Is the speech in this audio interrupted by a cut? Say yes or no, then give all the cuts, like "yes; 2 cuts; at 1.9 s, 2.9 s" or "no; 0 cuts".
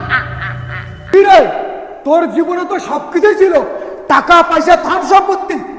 yes; 1 cut; at 1.1 s